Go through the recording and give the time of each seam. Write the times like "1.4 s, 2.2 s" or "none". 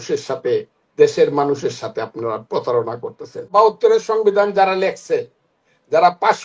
3.5 s